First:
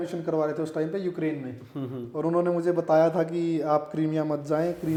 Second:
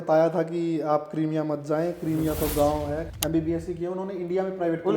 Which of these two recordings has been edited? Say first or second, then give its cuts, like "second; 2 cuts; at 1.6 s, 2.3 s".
second; 1 cut; at 3.1 s